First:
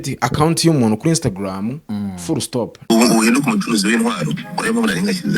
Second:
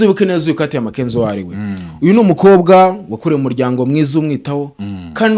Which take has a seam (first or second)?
first